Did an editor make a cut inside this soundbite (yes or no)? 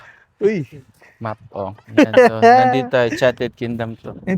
yes